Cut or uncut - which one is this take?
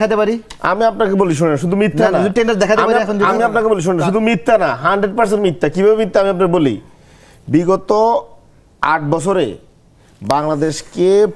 uncut